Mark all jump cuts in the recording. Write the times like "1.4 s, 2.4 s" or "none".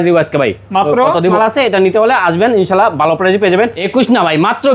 1.3 s, 3.8 s